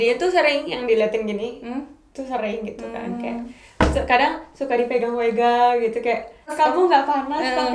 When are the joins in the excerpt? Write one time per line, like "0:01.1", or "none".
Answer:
0:06.5

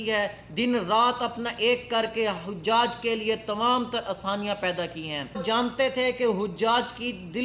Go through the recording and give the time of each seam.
0:05.4

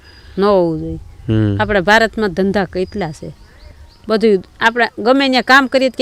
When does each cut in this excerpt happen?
none

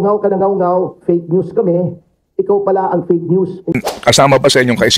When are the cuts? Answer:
0:03.8

